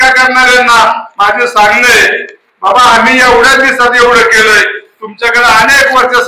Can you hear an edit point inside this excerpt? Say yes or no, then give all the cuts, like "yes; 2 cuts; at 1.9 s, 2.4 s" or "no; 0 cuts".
no; 0 cuts